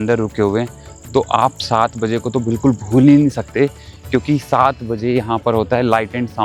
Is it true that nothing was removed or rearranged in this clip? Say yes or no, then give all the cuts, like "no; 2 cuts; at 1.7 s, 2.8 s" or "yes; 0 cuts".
yes; 0 cuts